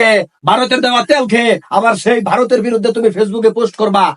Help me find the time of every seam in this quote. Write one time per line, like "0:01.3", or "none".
none